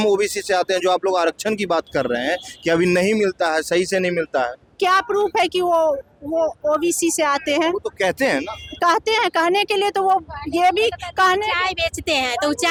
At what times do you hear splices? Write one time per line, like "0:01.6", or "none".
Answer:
none

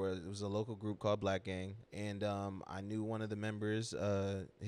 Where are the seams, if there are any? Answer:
0:01.8

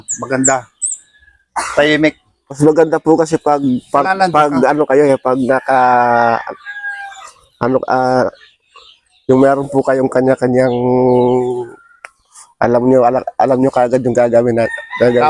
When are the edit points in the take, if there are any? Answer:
0:02.6

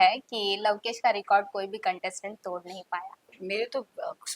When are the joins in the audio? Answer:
0:03.3

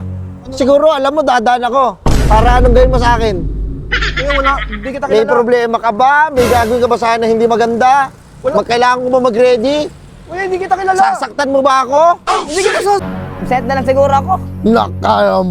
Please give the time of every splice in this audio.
0:13.0

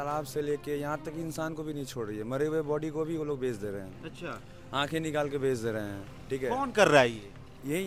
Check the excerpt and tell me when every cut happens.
none

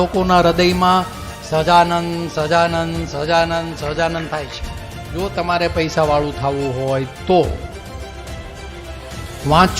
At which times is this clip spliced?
0:05.2

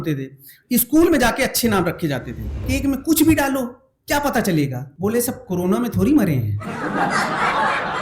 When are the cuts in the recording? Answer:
0:02.6
0:04.8

